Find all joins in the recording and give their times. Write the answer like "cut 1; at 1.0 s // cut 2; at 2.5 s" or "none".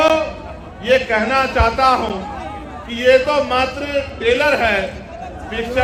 none